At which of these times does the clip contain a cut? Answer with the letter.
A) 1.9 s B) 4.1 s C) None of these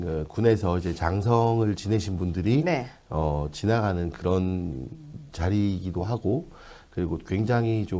C